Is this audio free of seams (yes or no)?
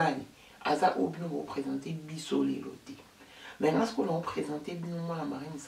yes